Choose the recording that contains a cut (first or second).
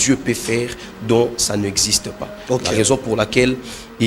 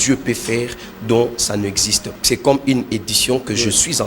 second